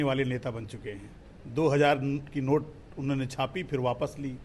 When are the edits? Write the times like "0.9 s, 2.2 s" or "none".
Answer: none